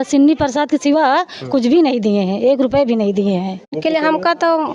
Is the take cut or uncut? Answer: cut